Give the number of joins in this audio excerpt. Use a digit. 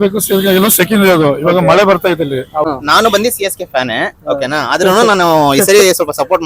1